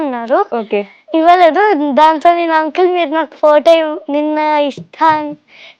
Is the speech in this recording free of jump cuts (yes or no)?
yes